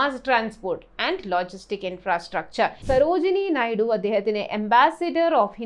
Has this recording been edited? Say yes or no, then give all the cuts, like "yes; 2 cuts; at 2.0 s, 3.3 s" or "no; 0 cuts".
yes; 1 cut; at 2.8 s